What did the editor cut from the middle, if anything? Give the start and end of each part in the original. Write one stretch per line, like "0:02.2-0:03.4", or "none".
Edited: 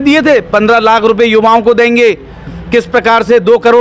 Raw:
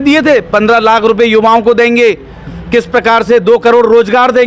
none